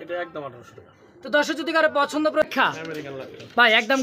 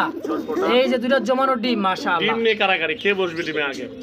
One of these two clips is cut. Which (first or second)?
first